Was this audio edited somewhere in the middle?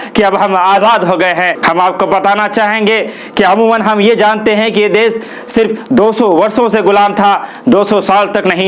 yes; 1 cut; at 1.6 s

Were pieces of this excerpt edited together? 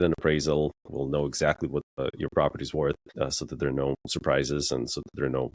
yes; 2 cuts; at 2.0 s, 3.1 s

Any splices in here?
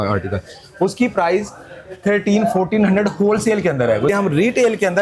yes; 1 cut; at 4.1 s

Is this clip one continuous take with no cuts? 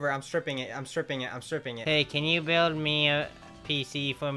yes; 0 cuts

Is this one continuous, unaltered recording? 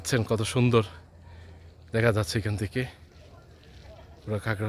yes; 0 cuts

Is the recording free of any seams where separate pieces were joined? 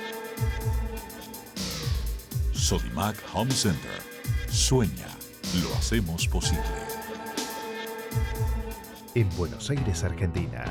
yes; 0 cuts

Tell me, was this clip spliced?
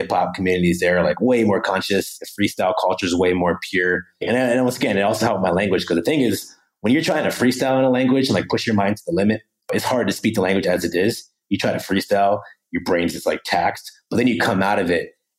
yes; 1 cut; at 4.2 s

